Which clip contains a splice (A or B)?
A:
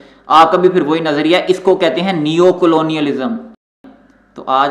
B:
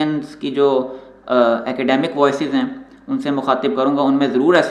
A